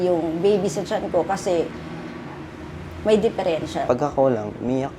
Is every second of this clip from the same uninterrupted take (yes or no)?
no